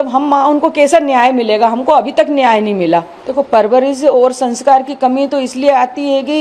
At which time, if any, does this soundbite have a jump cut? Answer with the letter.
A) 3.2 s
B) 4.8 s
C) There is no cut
A